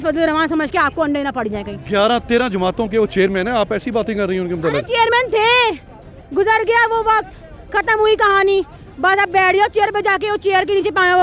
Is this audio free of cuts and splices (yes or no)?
yes